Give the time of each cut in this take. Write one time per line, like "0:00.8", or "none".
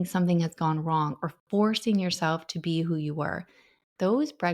none